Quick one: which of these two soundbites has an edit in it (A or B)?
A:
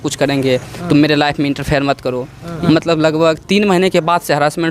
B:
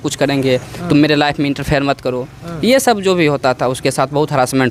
A